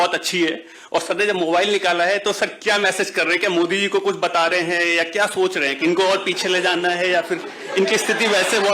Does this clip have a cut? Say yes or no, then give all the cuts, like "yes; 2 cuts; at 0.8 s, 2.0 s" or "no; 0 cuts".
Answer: no; 0 cuts